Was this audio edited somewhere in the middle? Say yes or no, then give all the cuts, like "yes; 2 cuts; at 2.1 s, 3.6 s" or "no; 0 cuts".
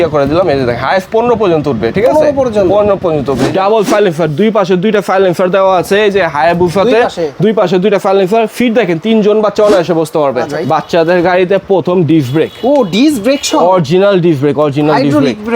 yes; 2 cuts; at 3.5 s, 10.5 s